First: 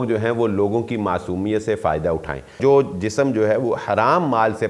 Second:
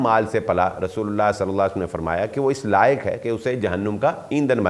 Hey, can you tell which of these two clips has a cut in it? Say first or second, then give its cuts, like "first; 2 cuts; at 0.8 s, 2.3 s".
first; 1 cut; at 2.6 s